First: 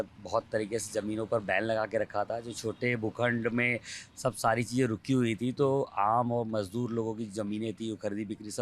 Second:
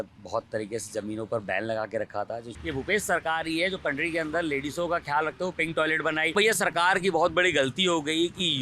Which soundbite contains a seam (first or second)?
second